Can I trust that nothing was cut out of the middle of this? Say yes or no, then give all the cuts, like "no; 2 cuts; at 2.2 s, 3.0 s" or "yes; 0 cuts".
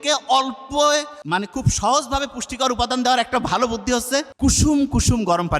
no; 2 cuts; at 1.2 s, 4.3 s